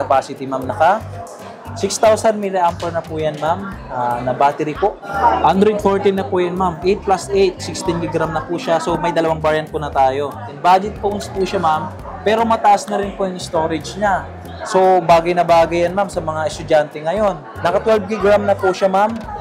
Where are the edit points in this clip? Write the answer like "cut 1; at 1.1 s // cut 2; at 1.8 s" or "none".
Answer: cut 1; at 5.1 s // cut 2; at 10.5 s // cut 3; at 17.5 s